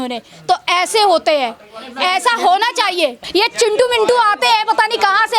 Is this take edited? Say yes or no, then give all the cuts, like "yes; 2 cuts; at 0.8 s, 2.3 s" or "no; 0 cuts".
no; 0 cuts